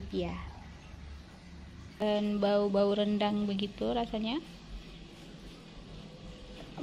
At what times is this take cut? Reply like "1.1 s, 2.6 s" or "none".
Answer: 2.0 s